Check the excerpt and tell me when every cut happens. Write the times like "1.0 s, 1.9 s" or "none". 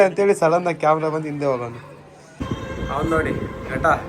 2.4 s